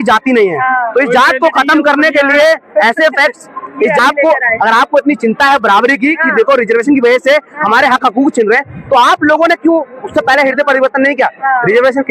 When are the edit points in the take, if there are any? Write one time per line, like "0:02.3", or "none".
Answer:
0:04.0